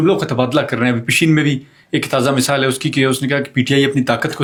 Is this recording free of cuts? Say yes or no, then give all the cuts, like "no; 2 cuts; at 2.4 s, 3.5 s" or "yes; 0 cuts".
yes; 0 cuts